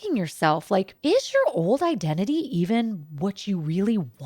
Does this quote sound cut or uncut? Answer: cut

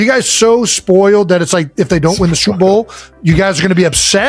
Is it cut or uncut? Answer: uncut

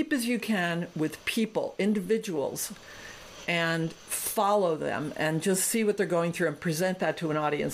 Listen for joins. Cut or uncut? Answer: uncut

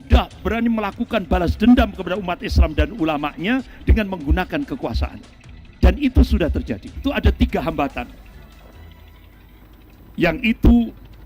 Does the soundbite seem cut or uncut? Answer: cut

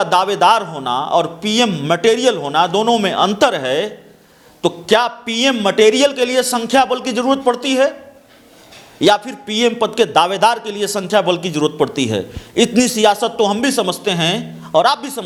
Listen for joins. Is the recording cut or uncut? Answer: uncut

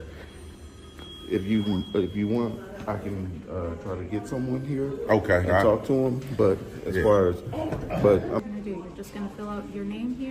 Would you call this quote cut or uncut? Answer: cut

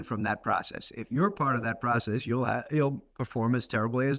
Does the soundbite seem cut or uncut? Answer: uncut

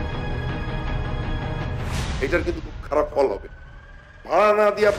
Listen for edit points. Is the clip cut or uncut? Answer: uncut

